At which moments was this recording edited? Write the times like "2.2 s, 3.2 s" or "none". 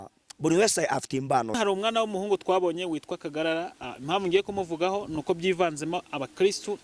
1.6 s